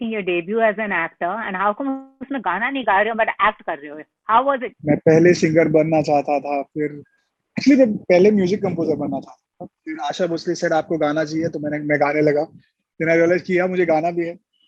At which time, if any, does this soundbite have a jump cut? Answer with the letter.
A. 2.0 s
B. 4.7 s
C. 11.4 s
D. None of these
B